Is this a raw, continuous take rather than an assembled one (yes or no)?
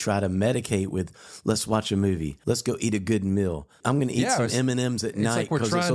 no